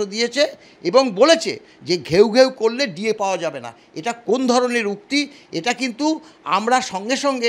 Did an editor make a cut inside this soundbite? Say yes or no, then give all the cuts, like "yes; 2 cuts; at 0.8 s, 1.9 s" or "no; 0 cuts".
no; 0 cuts